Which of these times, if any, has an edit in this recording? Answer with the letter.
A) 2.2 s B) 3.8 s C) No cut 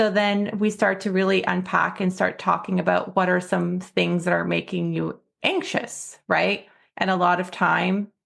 C